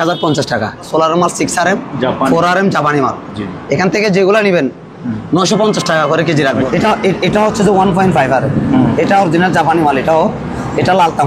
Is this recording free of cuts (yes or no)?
no